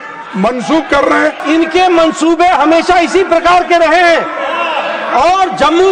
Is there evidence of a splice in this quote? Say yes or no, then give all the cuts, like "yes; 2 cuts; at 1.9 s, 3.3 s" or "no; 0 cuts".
yes; 1 cut; at 1.4 s